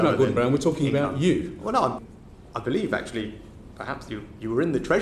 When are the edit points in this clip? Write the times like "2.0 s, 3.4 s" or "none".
2.0 s